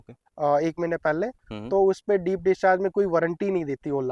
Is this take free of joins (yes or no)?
yes